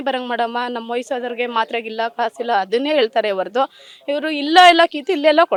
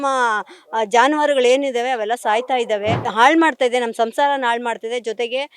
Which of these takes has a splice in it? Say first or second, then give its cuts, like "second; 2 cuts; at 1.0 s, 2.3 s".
second; 1 cut; at 3.0 s